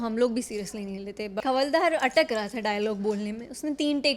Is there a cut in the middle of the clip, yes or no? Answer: yes